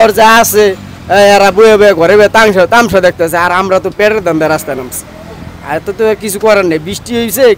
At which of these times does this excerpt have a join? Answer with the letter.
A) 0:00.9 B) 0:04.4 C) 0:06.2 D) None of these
D